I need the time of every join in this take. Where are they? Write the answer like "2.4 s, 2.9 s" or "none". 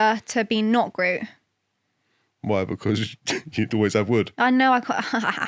none